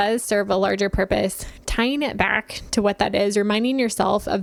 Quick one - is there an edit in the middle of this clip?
no; 0 cuts

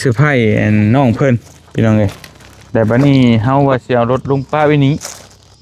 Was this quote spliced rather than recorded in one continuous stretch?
no; 0 cuts

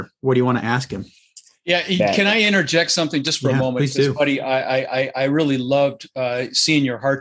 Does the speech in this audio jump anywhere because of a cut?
no; 0 cuts

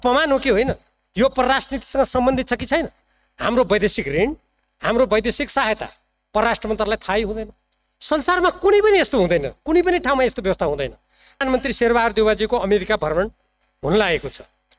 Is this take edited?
yes; 1 cut; at 11.4 s

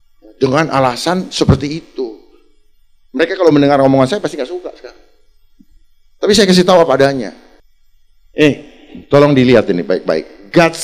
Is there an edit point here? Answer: no; 0 cuts

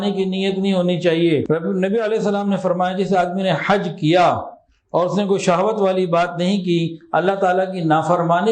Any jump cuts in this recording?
yes; 1 cut; at 1.4 s

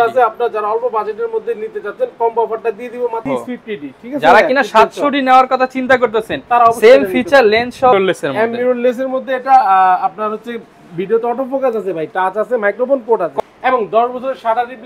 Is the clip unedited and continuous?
no; 3 cuts; at 3.3 s, 7.9 s, 13.3 s

